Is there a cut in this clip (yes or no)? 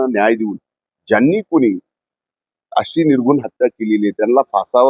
no